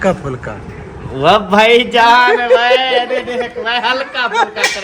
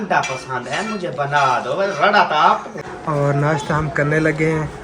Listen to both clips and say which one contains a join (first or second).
second